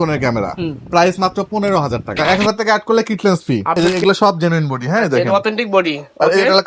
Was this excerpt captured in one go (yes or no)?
no